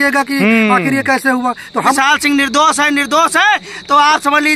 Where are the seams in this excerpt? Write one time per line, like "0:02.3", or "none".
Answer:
0:02.0